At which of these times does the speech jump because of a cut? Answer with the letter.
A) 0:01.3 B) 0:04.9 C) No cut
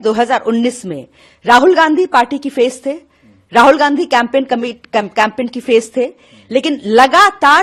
C